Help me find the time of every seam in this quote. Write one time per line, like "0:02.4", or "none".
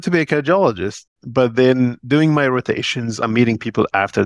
0:03.2